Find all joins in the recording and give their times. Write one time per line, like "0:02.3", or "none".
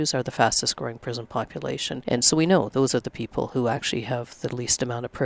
0:02.0

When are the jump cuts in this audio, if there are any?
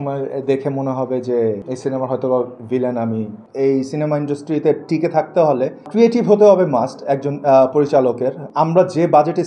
0:03.4
0:08.4

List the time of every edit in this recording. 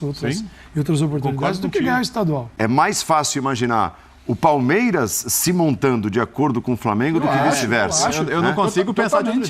0:02.5

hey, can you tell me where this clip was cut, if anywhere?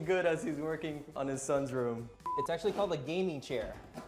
0:01.1
0:02.3

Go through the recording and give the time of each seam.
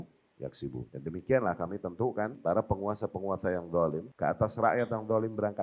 0:00.9
0:02.4
0:04.1

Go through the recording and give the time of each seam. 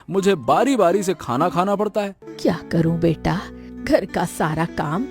0:02.2

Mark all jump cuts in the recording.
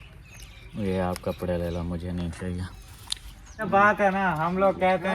0:03.7

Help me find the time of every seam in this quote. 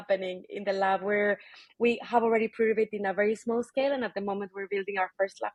none

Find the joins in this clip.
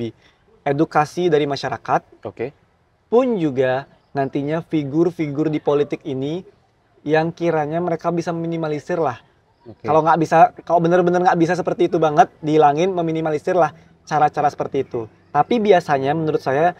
none

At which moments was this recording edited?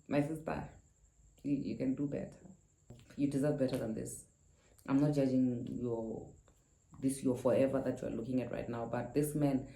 0:03.0

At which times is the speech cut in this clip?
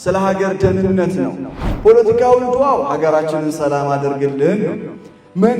0:01.6

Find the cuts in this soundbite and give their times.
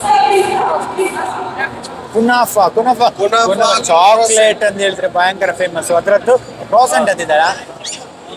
none

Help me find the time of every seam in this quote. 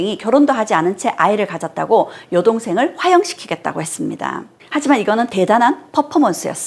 0:04.6

